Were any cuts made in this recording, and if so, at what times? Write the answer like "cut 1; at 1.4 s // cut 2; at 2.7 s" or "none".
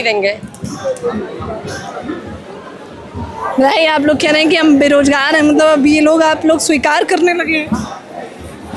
none